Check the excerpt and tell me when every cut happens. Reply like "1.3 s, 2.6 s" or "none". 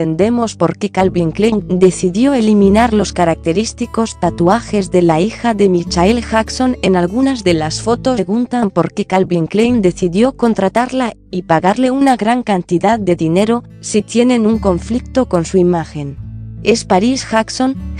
none